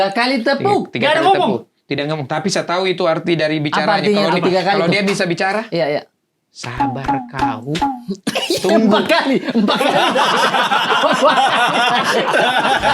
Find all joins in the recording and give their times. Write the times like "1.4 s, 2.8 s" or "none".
none